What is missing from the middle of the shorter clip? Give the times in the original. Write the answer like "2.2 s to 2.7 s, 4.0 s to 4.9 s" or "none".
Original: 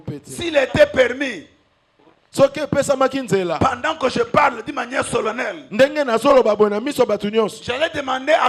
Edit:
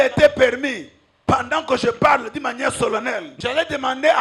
1.8 s to 3.6 s, 5.7 s to 7.6 s